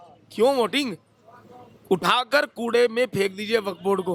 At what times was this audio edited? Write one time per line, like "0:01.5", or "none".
none